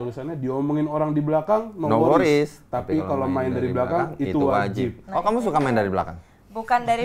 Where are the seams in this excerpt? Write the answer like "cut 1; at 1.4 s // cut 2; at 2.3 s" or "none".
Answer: none